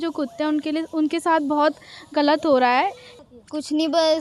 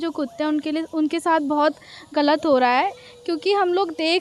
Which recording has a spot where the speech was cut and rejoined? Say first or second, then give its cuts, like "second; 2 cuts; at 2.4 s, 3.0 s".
first; 1 cut; at 3.1 s